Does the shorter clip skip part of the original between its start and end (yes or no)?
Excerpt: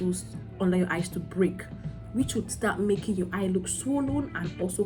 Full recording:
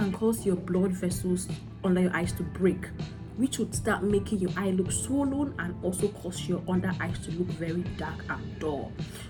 no